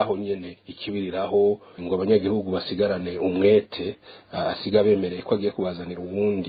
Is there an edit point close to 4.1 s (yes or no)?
no